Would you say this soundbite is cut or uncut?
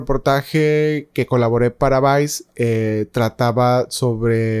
uncut